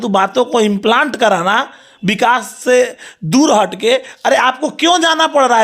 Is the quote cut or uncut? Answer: uncut